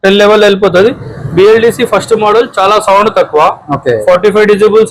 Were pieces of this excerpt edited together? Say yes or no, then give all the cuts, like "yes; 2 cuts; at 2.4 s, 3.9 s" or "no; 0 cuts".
no; 0 cuts